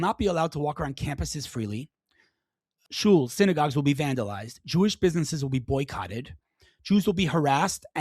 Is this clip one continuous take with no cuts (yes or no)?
no